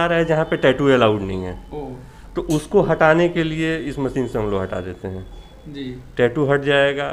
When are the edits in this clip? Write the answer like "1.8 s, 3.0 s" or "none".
none